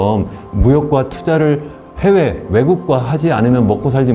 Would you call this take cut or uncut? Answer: uncut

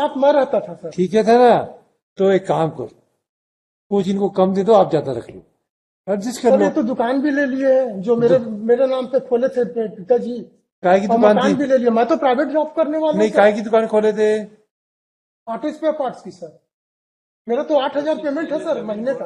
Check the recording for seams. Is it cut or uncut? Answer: uncut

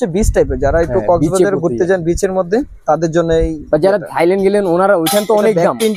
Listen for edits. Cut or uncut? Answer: uncut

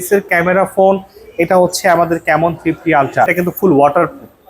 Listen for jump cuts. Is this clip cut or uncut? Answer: cut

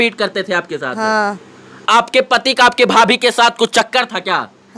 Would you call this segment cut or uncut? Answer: cut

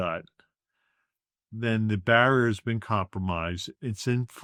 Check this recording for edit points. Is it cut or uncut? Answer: uncut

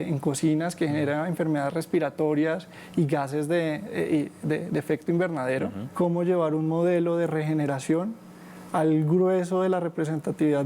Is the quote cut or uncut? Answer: cut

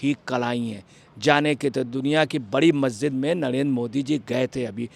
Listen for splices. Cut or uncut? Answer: uncut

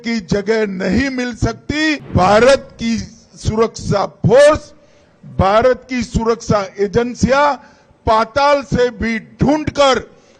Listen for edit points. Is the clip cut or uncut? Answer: cut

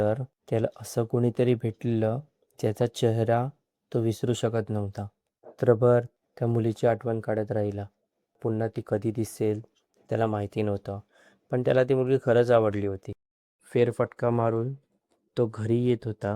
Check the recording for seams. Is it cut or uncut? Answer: cut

